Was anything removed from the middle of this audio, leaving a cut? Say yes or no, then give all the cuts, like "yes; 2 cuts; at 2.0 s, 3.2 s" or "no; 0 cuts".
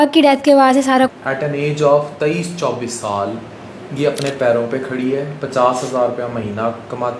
yes; 1 cut; at 1.1 s